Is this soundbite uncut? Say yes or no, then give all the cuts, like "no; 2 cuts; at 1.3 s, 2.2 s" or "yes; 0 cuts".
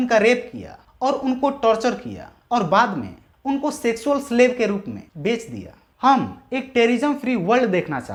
yes; 0 cuts